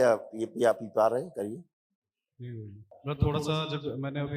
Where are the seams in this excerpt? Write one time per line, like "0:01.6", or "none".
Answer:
0:02.9